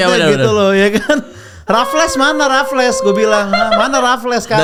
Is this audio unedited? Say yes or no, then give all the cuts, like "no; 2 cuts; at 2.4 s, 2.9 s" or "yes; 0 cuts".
yes; 0 cuts